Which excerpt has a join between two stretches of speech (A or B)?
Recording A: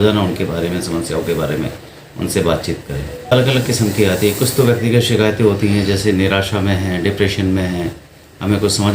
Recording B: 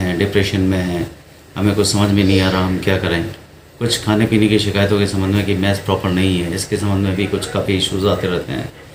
A